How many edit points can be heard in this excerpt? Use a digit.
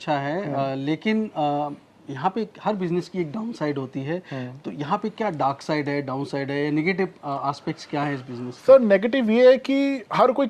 0